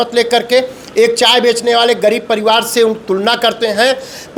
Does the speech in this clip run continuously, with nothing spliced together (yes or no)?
yes